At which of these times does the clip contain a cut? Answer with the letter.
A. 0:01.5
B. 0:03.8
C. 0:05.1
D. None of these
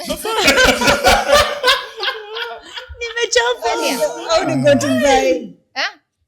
B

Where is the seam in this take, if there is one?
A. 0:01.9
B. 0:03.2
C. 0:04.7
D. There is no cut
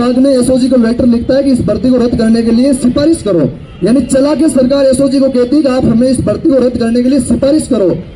D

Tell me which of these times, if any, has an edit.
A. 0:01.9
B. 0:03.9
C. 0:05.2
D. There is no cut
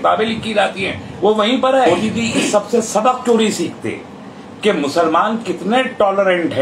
A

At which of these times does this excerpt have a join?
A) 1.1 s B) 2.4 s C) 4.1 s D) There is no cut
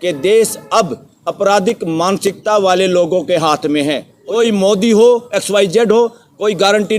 C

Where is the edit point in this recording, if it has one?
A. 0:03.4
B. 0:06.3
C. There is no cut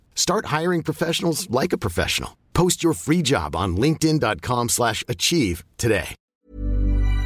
B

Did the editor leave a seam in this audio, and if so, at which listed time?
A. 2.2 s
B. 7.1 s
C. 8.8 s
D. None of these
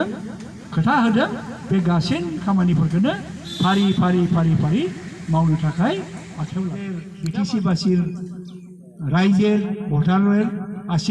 B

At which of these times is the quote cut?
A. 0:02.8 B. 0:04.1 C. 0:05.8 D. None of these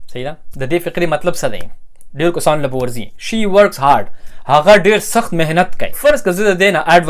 C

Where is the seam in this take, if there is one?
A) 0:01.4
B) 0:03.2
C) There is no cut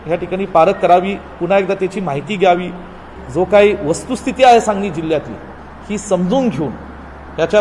B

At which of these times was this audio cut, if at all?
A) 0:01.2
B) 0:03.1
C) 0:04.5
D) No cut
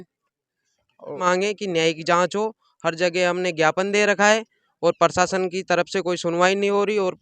A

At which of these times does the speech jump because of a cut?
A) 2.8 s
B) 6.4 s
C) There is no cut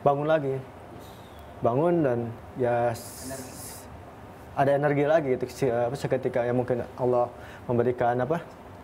C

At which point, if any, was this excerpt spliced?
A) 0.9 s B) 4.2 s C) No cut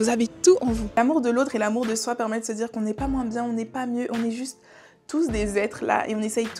A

